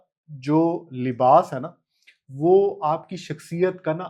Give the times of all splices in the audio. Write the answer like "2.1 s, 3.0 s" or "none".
none